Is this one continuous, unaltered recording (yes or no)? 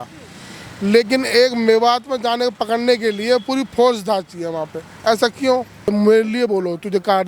no